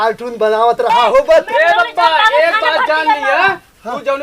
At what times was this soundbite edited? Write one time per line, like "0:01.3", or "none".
0:01.5